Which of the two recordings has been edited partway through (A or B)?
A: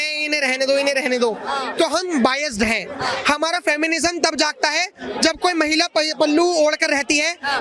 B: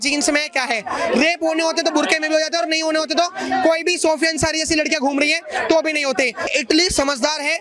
B